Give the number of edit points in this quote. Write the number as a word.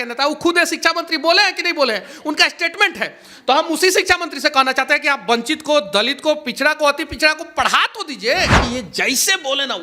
one